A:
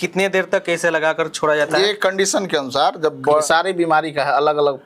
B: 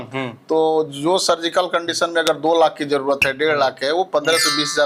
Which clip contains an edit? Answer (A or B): A